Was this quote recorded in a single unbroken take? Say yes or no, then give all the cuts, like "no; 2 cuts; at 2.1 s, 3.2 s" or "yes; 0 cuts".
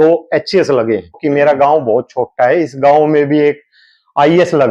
no; 1 cut; at 1.2 s